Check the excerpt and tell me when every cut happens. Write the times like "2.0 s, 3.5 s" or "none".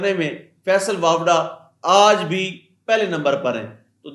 none